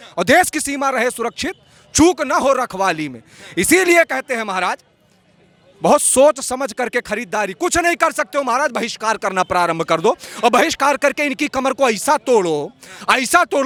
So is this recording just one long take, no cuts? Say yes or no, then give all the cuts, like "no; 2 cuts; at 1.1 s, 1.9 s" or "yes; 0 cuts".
yes; 0 cuts